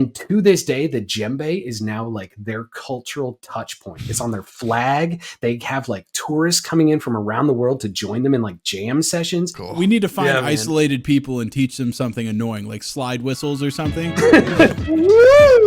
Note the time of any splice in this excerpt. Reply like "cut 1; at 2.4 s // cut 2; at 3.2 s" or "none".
cut 1; at 9.6 s // cut 2; at 14.8 s